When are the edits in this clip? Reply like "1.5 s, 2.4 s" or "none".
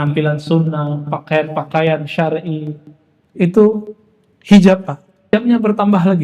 5.3 s